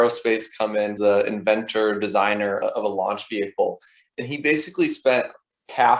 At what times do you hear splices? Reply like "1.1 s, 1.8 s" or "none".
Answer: 0.9 s